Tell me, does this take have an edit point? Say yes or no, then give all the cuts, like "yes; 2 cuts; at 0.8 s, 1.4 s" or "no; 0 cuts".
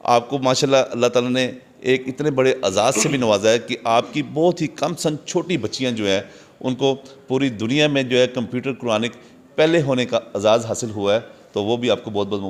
no; 0 cuts